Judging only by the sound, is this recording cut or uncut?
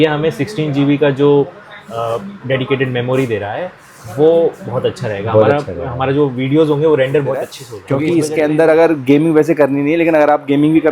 cut